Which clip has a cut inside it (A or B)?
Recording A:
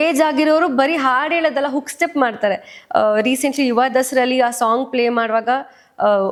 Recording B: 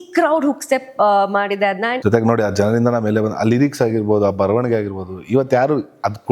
B